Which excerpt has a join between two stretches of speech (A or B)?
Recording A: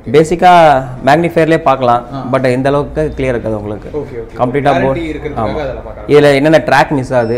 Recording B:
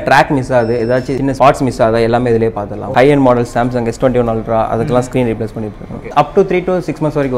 B